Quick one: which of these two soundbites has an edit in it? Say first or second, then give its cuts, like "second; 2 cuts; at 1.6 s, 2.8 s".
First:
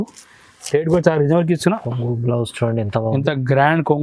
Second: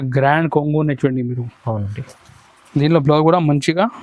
first; 1 cut; at 1.8 s